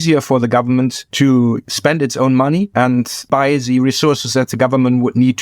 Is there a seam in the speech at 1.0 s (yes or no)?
yes